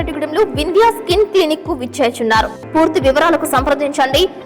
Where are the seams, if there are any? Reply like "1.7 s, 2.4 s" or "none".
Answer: 2.6 s